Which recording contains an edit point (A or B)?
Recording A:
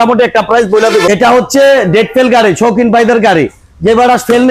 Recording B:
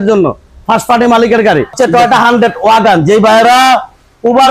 B